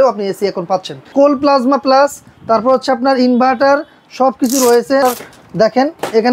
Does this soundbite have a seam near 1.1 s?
yes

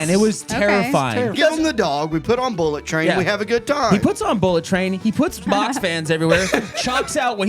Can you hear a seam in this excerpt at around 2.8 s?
no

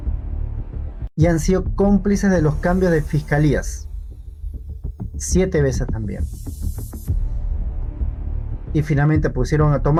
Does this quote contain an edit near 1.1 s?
no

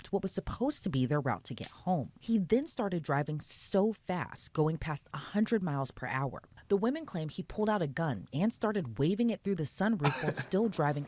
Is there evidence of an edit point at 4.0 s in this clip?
no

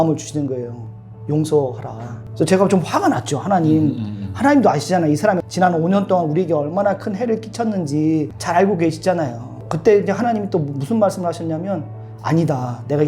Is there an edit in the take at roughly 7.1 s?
no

